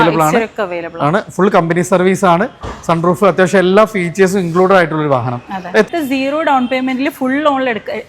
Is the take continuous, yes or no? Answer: no